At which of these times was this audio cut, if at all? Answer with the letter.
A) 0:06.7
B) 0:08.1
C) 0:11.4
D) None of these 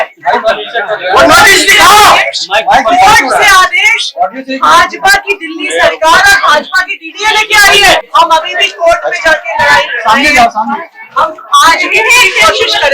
B